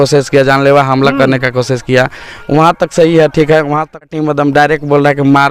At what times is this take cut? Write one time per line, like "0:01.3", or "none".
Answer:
0:04.0